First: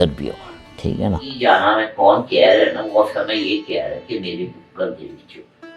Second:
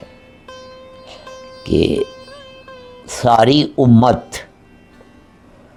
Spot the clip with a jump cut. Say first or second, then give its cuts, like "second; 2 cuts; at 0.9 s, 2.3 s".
first; 1 cut; at 1.3 s